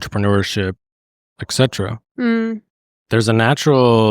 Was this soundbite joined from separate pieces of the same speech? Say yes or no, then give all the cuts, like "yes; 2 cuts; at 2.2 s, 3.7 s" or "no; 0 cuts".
no; 0 cuts